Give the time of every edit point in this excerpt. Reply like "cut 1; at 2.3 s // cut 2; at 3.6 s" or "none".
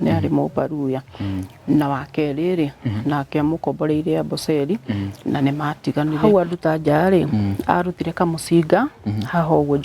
cut 1; at 6.3 s